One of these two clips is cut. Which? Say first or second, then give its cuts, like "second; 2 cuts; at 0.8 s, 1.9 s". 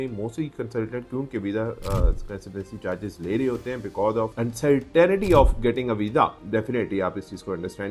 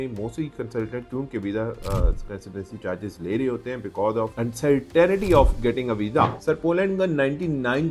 second; 1 cut; at 6.4 s